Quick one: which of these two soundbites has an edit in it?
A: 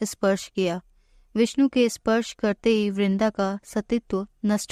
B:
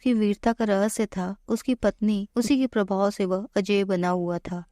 B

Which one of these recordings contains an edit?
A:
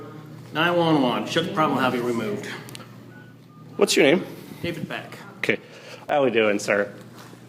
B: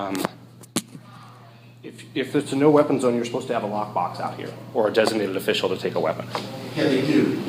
A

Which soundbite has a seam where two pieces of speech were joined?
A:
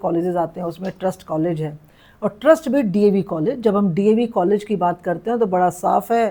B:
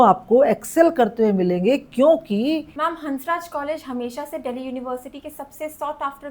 B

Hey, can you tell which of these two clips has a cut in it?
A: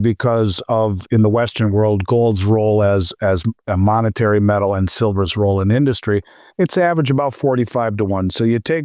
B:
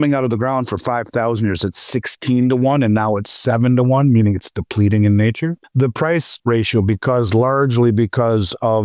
B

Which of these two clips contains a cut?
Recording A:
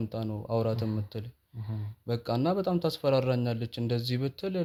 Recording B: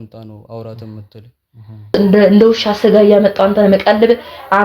B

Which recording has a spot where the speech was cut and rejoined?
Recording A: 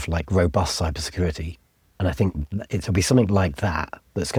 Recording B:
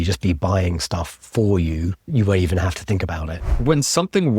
B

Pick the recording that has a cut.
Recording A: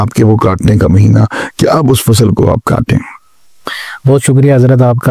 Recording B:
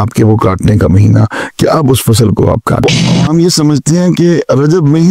B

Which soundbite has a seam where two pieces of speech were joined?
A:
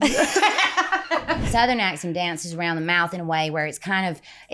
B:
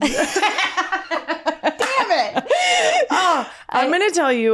A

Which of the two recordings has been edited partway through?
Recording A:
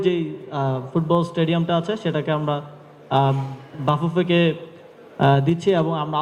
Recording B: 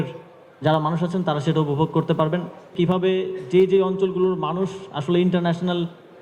B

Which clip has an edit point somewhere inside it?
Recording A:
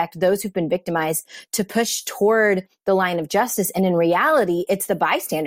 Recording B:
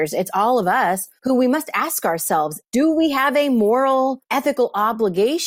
B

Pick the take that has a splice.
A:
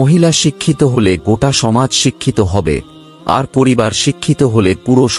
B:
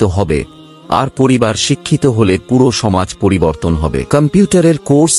B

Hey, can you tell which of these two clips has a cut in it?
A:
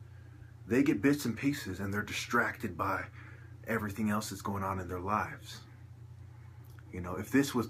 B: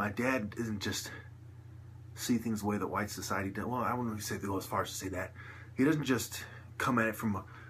A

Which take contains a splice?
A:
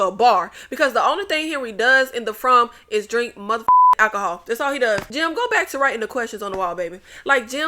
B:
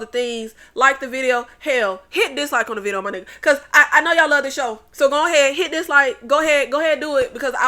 A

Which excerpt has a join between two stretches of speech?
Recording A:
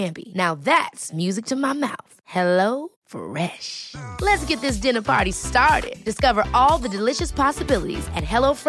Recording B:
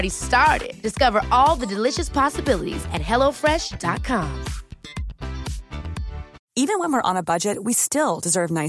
B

